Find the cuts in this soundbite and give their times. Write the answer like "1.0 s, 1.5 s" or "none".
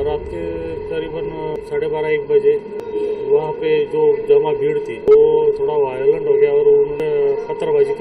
1.6 s, 2.8 s, 5.0 s, 7.0 s